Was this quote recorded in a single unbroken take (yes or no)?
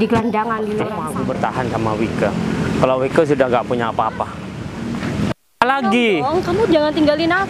no